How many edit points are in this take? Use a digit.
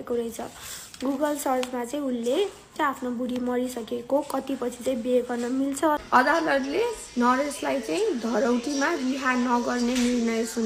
2